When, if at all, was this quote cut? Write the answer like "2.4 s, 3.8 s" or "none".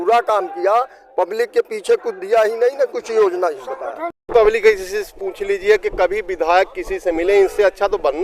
4.3 s